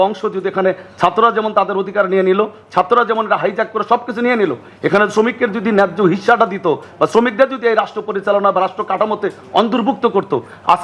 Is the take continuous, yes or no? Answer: yes